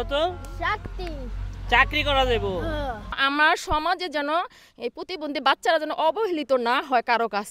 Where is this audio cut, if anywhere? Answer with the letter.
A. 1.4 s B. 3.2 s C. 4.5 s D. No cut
B